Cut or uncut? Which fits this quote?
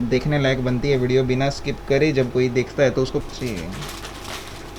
cut